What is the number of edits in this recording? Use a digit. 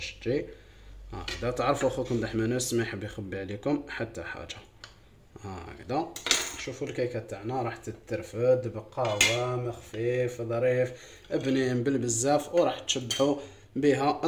0